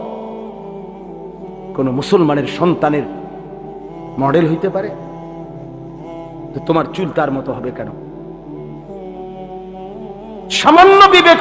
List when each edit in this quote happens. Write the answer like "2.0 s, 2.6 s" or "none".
none